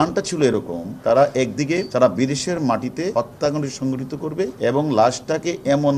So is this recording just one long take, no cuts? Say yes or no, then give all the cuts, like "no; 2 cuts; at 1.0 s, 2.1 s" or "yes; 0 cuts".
no; 4 cuts; at 1.0 s, 1.9 s, 3.1 s, 4.5 s